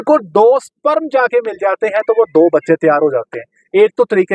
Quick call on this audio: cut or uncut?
uncut